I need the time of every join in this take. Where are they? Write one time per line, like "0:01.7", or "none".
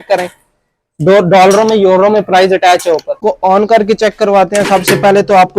0:03.1